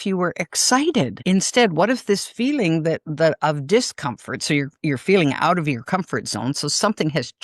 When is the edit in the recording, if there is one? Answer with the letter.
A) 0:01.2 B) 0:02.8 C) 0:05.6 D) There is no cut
A